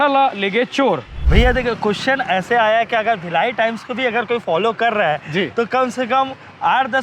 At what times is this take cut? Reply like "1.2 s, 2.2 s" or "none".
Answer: 1.1 s